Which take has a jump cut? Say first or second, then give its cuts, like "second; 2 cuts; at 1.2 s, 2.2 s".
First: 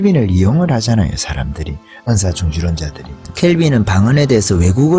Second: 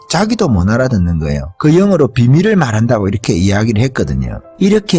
second; 2 cuts; at 1.4 s, 3.2 s